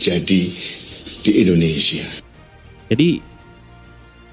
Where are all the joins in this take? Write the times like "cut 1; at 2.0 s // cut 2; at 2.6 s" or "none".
cut 1; at 2.3 s

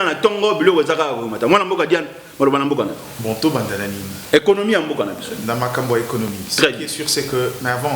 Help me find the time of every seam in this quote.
cut 1; at 3.1 s

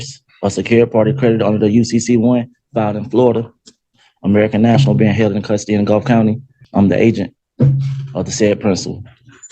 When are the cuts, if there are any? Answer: cut 1; at 6.5 s

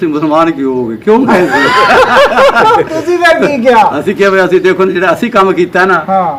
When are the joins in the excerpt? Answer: none

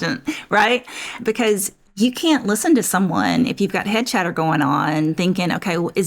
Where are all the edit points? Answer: cut 1; at 1.2 s

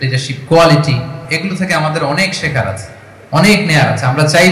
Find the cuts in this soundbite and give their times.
cut 1; at 1.2 s

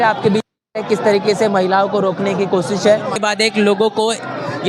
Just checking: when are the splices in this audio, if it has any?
cut 1; at 3.2 s

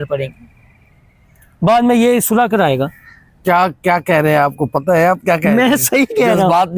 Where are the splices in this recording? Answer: none

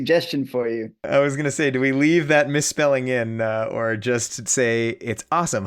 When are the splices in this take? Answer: cut 1; at 1.0 s

